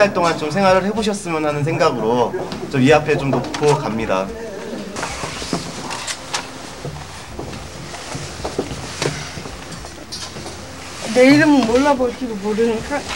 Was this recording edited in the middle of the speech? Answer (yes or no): no